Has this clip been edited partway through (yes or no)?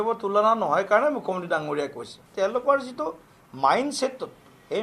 yes